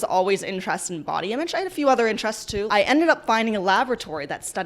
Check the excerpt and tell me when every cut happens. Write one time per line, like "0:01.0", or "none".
0:02.7